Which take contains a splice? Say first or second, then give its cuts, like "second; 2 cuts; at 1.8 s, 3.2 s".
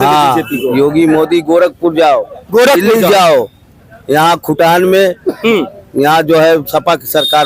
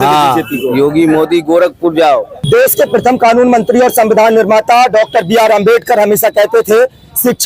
second; 1 cut; at 2.3 s